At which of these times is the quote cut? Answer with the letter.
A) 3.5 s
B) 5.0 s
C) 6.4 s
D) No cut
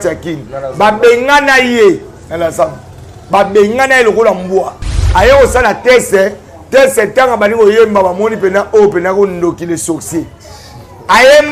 B